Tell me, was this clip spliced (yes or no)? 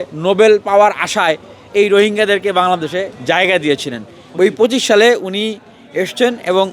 yes